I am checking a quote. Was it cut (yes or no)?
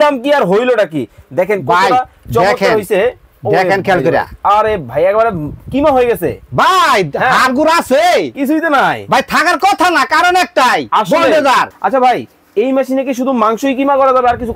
yes